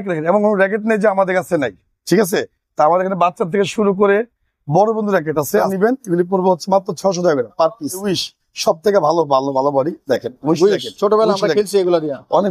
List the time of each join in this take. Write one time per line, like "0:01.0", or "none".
0:05.7
0:08.0